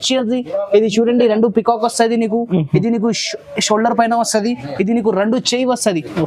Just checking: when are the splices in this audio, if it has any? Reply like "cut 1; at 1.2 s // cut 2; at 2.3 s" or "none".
none